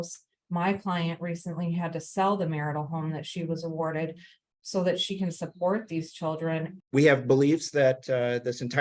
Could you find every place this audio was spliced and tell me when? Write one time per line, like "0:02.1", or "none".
0:06.7

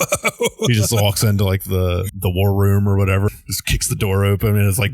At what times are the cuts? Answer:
0:02.1
0:03.3

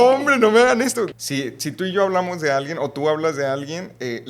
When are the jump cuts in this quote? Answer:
0:01.2

